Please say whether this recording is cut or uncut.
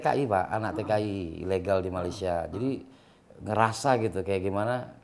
uncut